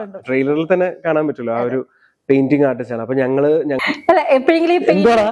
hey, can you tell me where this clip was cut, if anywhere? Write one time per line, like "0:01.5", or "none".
0:03.8